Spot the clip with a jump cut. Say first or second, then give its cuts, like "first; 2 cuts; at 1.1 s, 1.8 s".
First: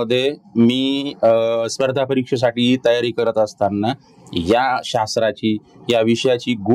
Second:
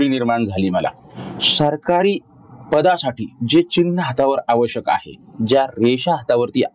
second; 1 cut; at 1.0 s